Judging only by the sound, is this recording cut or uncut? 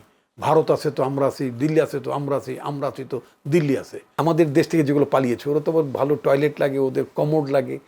cut